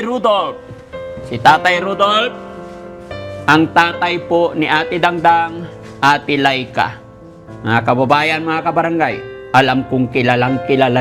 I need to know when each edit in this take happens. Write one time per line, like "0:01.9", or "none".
none

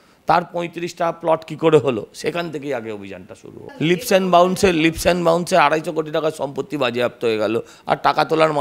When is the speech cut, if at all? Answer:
0:03.6

